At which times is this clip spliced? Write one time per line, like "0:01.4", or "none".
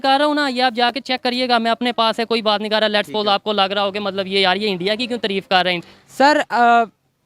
0:05.8